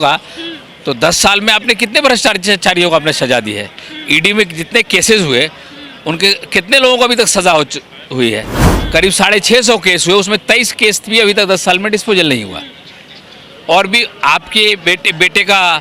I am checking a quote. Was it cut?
no; 0 cuts

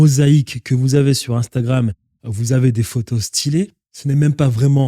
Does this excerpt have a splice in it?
yes; 1 cut; at 3.9 s

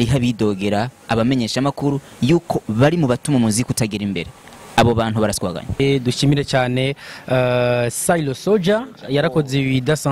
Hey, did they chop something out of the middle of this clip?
yes; 1 cut; at 5.8 s

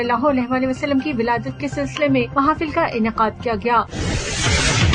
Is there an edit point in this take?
yes; 1 cut; at 3.9 s

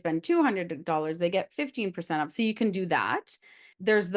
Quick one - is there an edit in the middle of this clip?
no; 0 cuts

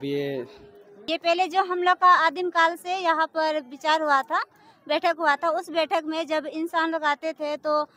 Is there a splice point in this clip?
yes; 1 cut; at 0.9 s

